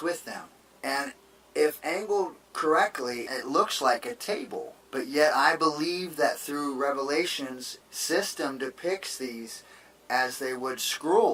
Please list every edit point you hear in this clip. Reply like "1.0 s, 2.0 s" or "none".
none